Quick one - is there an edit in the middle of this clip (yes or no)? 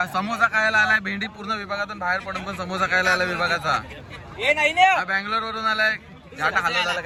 no